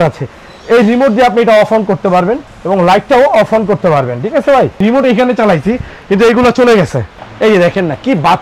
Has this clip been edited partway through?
yes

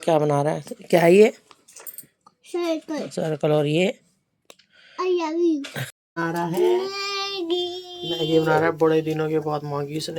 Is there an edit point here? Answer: yes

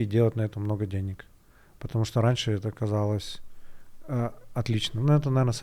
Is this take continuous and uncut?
yes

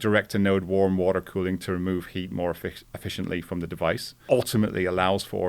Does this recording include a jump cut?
yes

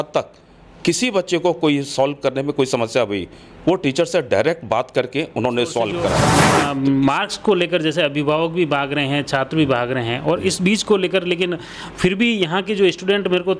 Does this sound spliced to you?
yes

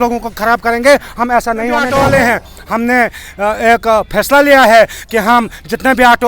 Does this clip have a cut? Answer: yes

